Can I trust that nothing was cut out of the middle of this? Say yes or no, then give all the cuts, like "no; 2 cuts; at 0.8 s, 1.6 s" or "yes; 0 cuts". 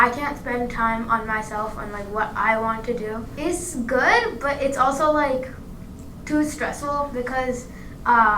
no; 1 cut; at 3.3 s